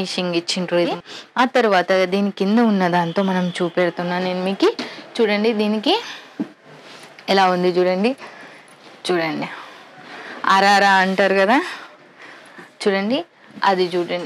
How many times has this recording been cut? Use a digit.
1